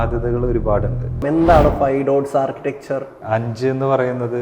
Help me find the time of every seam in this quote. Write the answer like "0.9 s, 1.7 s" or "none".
1.2 s, 3.1 s

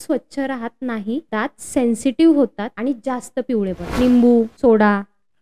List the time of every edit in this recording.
1.3 s, 2.7 s, 3.8 s, 4.5 s

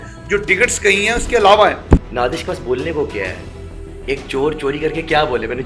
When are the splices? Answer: 2.0 s

